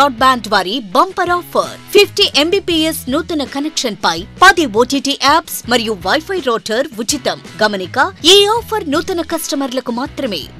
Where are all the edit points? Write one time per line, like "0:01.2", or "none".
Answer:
none